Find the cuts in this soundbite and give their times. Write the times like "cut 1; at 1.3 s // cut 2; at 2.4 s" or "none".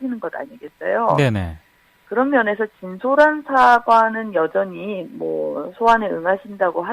cut 1; at 4.3 s